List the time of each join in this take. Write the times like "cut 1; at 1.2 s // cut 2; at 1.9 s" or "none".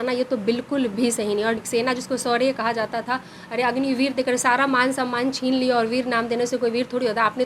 cut 1; at 1.6 s